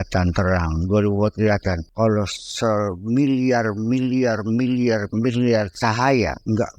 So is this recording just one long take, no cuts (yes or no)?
no